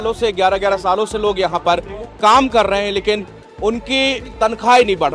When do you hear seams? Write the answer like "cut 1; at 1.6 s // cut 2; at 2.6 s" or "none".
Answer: none